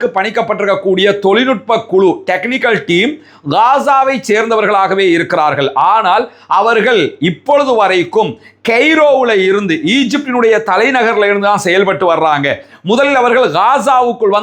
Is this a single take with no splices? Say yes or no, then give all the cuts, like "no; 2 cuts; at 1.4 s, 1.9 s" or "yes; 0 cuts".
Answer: yes; 0 cuts